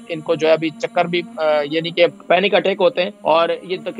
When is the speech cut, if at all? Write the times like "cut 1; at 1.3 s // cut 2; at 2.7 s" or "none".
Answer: cut 1; at 2.2 s // cut 2; at 3.1 s